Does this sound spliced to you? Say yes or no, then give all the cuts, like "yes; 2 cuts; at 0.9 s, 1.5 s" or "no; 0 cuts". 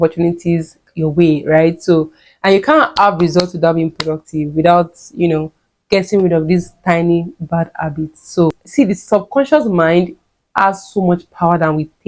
yes; 1 cut; at 8.5 s